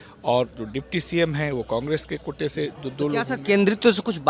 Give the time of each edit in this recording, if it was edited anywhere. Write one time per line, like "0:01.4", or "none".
none

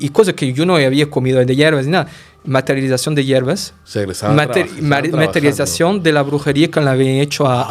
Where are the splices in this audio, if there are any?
0:03.8

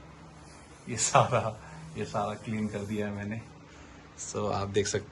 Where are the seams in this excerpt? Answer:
none

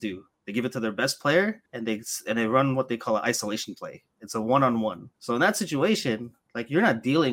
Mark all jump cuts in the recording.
0:01.7
0:05.1

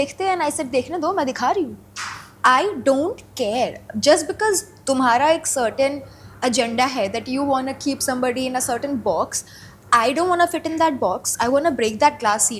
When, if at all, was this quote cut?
none

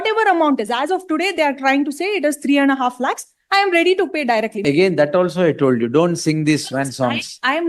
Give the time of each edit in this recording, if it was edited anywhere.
0:04.5

